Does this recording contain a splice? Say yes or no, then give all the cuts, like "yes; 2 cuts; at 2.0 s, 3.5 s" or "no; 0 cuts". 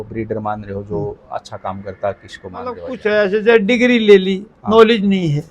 yes; 1 cut; at 2.9 s